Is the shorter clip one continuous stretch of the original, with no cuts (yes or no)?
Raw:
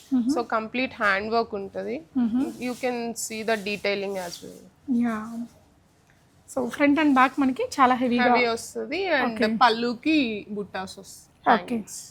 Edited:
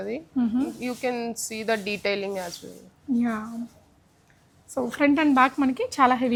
yes